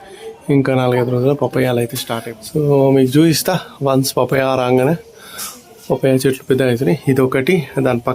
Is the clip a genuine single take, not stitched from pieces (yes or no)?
no